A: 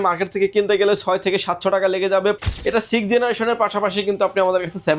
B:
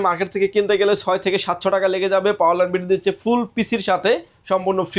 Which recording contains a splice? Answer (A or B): A